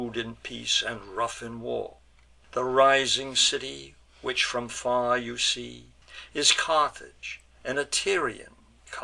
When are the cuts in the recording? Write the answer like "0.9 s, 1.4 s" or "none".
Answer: none